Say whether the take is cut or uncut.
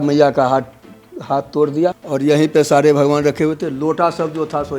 cut